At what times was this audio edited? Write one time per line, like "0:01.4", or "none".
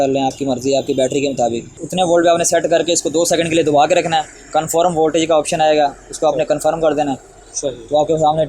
0:01.8